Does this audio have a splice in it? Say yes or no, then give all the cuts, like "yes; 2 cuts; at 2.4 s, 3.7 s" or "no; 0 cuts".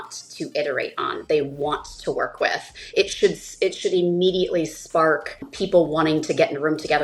yes; 1 cut; at 5.5 s